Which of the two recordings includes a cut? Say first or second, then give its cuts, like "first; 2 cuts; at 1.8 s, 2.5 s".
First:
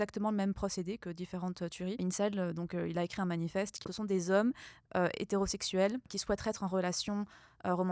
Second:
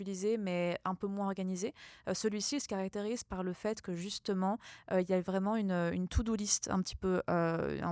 first; 3 cuts; at 2.0 s, 3.8 s, 6.1 s